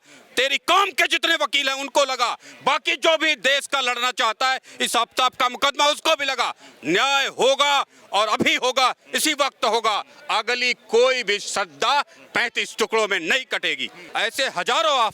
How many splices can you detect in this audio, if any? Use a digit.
1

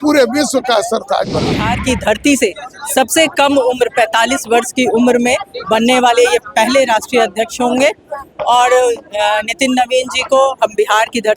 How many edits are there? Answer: 1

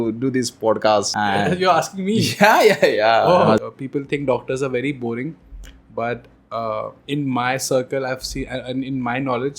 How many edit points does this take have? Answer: 2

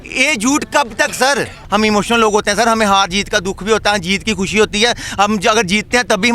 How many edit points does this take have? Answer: 1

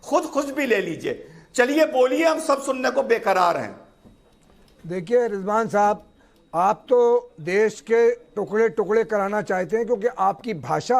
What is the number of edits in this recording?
1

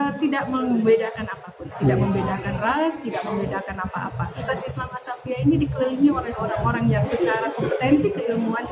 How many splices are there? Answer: 2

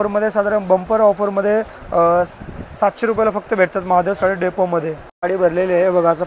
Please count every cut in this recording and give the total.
1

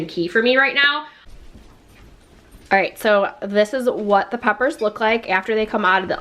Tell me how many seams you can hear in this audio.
1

